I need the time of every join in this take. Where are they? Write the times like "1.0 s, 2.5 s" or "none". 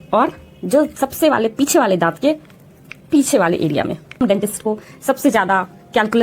4.2 s